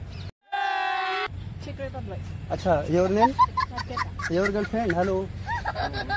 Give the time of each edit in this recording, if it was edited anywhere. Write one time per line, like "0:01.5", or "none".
0:01.3